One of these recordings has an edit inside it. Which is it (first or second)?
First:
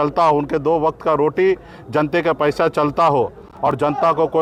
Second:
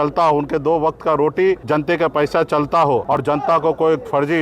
second